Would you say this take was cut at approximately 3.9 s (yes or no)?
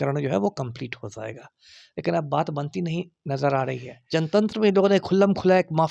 yes